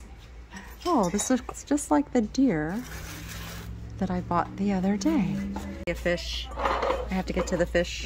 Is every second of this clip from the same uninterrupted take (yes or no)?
no